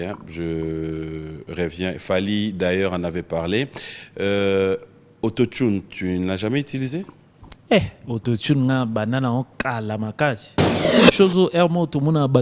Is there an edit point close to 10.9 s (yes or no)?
yes